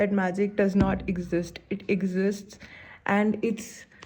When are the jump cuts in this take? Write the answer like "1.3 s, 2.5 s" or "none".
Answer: none